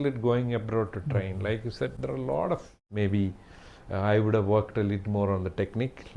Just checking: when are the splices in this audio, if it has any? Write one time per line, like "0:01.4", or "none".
0:02.9